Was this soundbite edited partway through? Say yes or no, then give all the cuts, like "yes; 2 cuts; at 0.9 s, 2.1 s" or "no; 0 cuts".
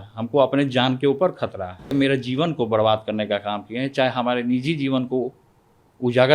yes; 1 cut; at 1.9 s